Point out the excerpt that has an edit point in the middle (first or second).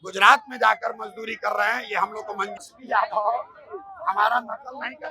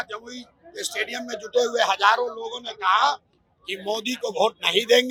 first